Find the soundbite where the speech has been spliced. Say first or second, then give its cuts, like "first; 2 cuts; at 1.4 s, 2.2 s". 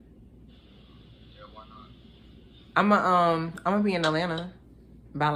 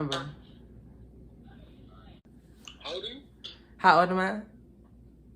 second; 1 cut; at 2.2 s